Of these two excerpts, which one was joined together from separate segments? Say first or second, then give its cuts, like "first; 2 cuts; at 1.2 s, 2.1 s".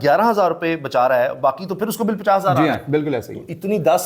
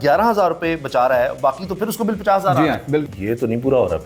second; 1 cut; at 3.1 s